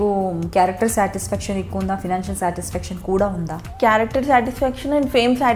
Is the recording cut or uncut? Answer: cut